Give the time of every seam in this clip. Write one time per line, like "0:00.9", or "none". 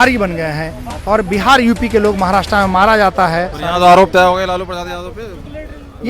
0:03.6